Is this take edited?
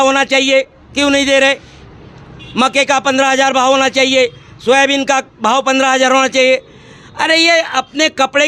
no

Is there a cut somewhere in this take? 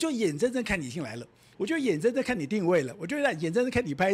no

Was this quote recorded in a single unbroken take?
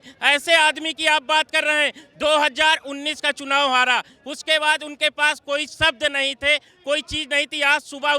yes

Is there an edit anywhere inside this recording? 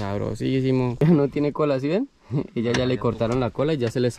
yes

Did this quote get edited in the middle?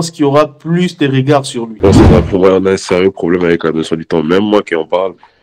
yes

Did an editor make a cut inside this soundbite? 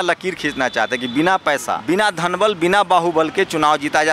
yes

